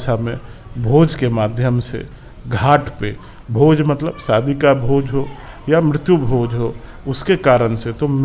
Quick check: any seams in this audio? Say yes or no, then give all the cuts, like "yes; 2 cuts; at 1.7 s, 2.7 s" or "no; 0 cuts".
no; 0 cuts